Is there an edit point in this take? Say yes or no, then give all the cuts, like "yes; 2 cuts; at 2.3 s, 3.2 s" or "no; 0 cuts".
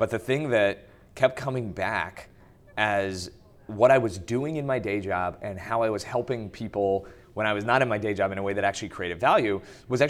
no; 0 cuts